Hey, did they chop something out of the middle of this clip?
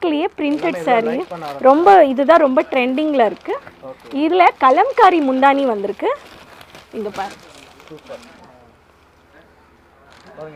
no; 0 cuts

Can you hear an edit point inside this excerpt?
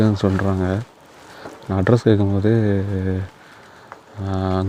no; 0 cuts

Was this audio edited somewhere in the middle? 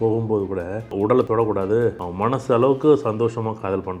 yes; 2 cuts; at 1.2 s, 2.0 s

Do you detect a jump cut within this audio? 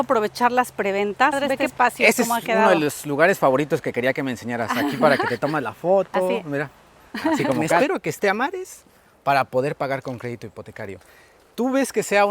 yes; 2 cuts; at 1.6 s, 7.8 s

